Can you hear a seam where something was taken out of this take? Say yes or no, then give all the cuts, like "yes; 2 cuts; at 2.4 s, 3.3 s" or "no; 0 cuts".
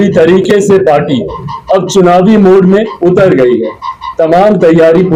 no; 0 cuts